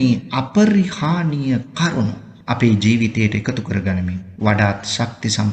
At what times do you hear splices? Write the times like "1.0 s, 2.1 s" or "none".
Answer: 2.3 s, 4.3 s